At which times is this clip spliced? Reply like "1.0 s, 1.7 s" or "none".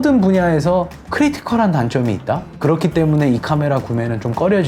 1.0 s, 2.5 s